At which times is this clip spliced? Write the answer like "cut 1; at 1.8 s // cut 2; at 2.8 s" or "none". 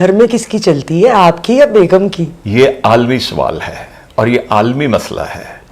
cut 1; at 2.3 s